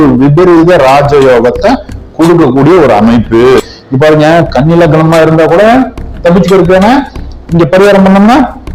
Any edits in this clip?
yes; 1 cut; at 3.6 s

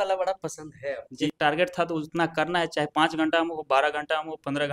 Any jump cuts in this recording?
yes; 1 cut; at 1.3 s

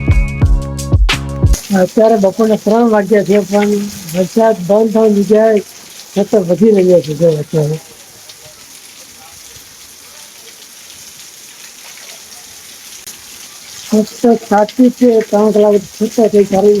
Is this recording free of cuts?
yes; 0 cuts

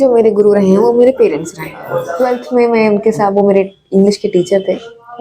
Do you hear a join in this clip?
yes; 1 cut; at 2.1 s

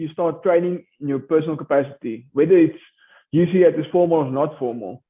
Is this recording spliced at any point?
no; 0 cuts

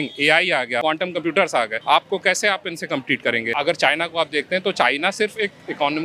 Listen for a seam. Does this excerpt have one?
yes; 3 cuts; at 0.8 s, 1.8 s, 3.5 s

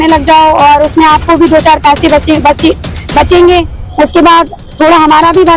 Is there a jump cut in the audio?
no; 0 cuts

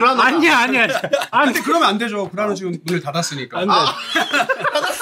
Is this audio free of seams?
no; 1 cut; at 1.3 s

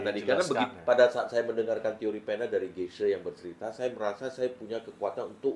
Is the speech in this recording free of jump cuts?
yes; 0 cuts

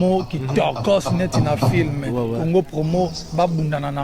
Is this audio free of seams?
yes; 0 cuts

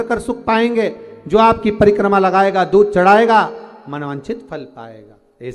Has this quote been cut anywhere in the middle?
no; 0 cuts

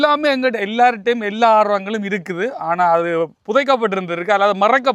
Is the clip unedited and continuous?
yes; 0 cuts

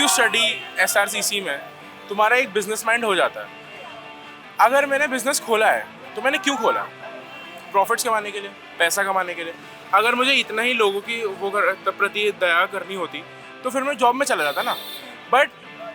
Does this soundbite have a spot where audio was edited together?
no; 0 cuts

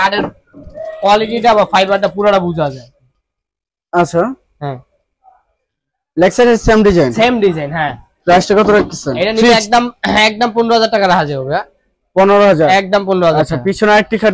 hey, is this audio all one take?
yes; 0 cuts

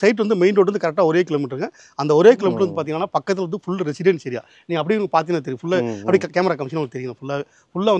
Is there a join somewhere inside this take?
no; 0 cuts

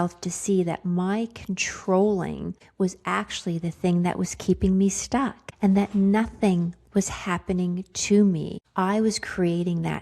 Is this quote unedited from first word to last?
no; 3 cuts; at 2.6 s, 5.4 s, 8.6 s

